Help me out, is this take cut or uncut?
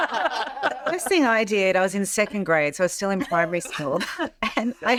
uncut